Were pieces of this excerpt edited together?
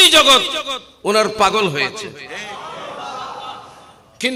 no; 0 cuts

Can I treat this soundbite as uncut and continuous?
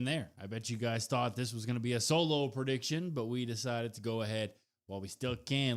no; 1 cut; at 3.8 s

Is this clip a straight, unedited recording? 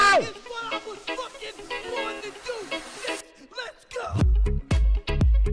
yes; 0 cuts

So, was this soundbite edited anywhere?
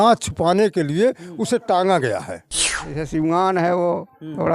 yes; 1 cut; at 2.9 s

